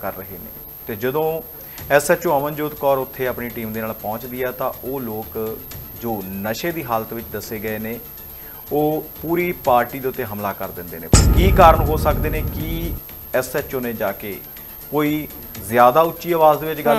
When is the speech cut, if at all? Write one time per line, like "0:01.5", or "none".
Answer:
0:11.1